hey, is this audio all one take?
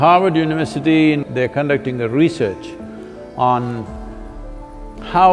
no; 1 cut; at 1.2 s

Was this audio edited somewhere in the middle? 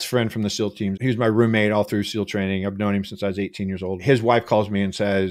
yes; 2 cuts; at 0.9 s, 4.0 s

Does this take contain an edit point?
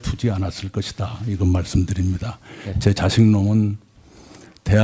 yes; 1 cut; at 3.5 s

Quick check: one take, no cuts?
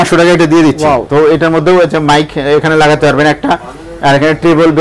yes; 0 cuts

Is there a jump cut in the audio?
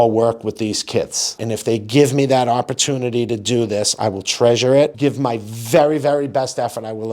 yes; 1 cut; at 1.3 s

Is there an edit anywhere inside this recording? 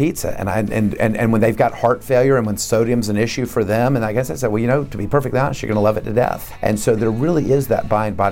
yes; 1 cut; at 6.5 s

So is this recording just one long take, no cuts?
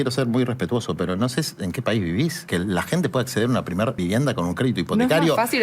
no; 2 cuts; at 2.4 s, 4.0 s

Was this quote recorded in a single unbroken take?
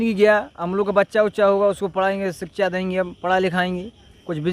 yes; 0 cuts

